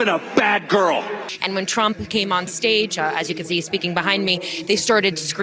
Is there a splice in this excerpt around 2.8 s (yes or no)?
no